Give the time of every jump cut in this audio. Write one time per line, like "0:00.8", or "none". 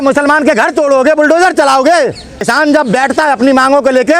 0:02.4